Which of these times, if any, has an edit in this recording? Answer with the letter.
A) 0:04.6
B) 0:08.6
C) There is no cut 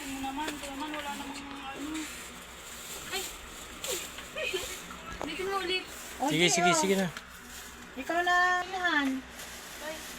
B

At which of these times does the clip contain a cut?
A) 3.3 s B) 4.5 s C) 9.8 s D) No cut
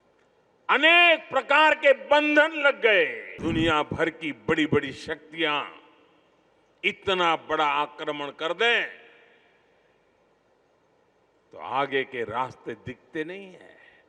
A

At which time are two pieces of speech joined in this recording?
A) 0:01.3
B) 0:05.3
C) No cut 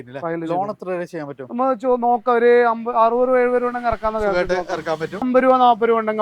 B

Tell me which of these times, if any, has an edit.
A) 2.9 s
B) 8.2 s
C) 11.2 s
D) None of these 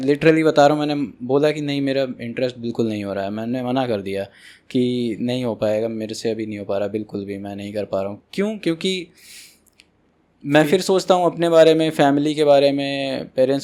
D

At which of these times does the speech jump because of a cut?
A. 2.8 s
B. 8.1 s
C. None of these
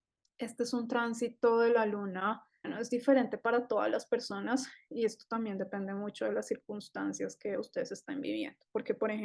A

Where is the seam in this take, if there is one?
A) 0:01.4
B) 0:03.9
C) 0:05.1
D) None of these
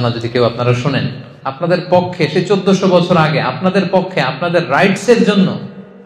A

